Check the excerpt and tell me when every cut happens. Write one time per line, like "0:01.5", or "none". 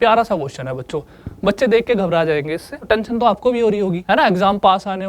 0:02.8
0:04.0